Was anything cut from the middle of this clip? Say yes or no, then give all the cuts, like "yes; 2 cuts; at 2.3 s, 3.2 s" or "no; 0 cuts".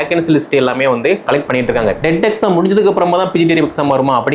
yes; 1 cut; at 2.0 s